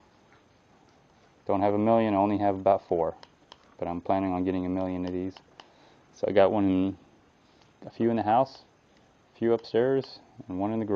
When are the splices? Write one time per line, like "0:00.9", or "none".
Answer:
0:09.8